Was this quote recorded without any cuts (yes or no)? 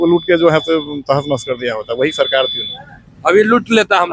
yes